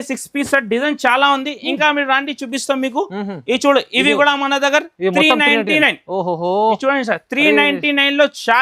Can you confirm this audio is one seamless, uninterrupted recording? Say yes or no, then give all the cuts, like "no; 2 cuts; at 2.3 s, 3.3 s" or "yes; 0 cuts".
yes; 0 cuts